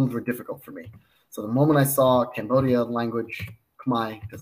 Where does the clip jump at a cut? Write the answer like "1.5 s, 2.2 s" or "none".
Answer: none